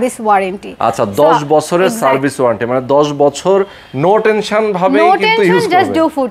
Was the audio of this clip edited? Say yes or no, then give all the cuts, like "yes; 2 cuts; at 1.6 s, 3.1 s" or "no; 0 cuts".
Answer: no; 0 cuts